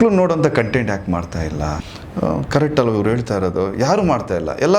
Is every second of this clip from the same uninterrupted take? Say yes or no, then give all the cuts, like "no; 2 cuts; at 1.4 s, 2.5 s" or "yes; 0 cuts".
no; 1 cut; at 1.9 s